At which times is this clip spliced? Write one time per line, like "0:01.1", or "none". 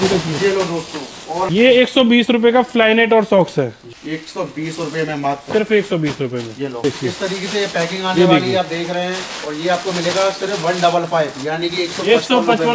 0:01.5
0:03.9
0:06.8